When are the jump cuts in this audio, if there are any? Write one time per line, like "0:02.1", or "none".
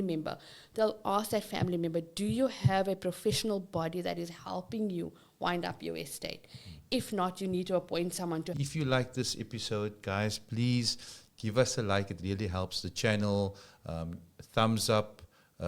0:08.6